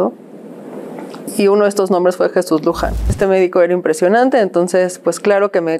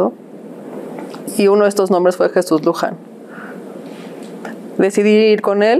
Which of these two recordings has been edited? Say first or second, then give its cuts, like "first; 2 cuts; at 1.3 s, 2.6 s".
first; 1 cut; at 3.1 s